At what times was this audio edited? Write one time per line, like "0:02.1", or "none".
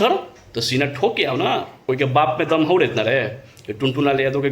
0:01.8